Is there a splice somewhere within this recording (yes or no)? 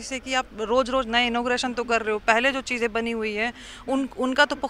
no